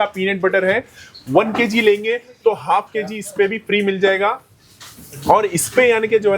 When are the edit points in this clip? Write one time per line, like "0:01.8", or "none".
none